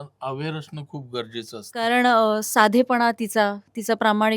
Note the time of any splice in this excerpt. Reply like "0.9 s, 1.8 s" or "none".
1.7 s